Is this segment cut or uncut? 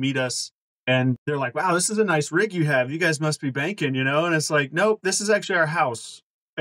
cut